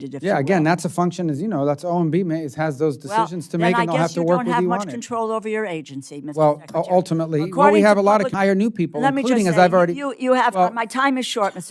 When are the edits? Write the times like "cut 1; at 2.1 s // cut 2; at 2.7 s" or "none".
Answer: cut 1; at 8.3 s